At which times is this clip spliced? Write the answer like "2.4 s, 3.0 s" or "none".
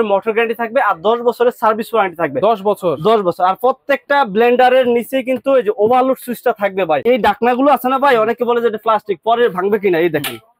7.0 s